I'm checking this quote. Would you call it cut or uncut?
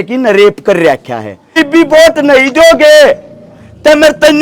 cut